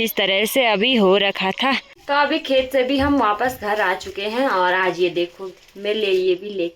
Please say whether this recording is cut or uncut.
cut